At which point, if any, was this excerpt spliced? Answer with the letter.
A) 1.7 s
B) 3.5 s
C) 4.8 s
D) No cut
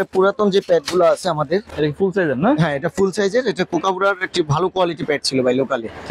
A